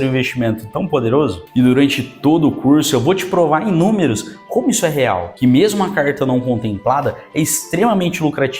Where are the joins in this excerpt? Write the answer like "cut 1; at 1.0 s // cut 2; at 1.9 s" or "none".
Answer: cut 1; at 1.4 s // cut 2; at 5.3 s